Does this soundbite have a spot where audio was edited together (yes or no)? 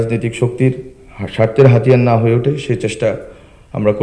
no